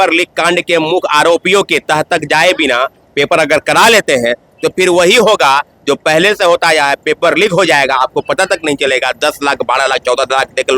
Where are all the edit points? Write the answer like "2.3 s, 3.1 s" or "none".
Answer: none